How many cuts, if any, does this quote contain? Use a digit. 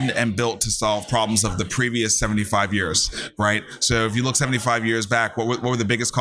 0